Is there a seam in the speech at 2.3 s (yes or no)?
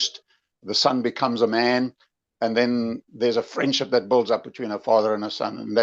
no